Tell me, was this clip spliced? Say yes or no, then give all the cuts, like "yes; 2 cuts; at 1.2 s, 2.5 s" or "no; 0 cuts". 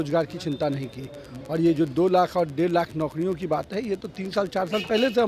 no; 0 cuts